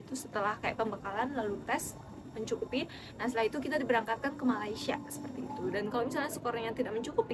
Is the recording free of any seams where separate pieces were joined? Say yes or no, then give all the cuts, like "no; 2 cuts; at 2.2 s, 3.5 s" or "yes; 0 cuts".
yes; 0 cuts